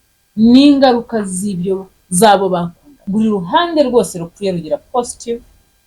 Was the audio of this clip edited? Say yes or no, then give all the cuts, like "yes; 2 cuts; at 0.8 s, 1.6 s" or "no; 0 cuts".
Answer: yes; 1 cut; at 3.0 s